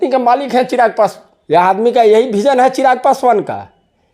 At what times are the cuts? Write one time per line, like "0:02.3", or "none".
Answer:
0:01.3

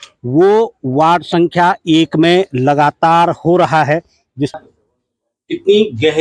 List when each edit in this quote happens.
0:04.5

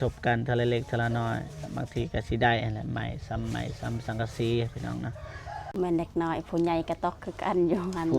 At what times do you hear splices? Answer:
0:05.7

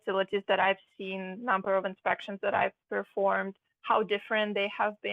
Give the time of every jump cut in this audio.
none

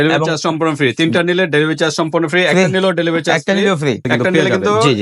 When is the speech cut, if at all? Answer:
none

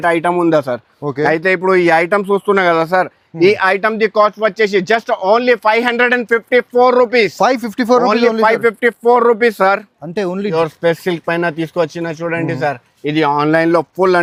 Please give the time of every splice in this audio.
none

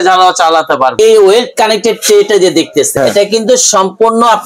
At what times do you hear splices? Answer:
0:00.9
0:02.9

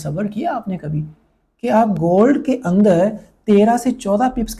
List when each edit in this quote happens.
none

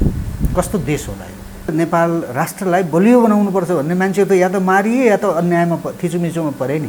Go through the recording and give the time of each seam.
0:01.7

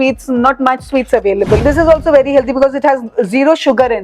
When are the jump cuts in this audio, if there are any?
0:01.6

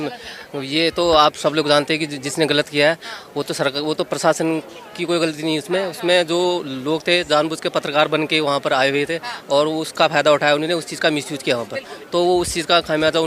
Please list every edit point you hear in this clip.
none

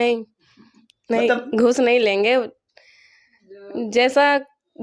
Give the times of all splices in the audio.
none

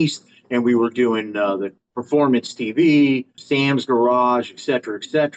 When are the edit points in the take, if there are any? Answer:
0:01.8
0:03.3

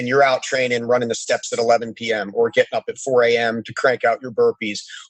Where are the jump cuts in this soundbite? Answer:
none

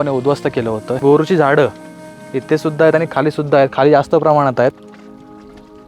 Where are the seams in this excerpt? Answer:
0:01.0

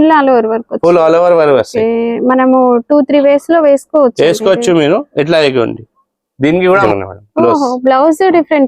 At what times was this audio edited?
0:06.8

